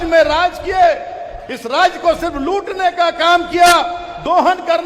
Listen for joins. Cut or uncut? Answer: uncut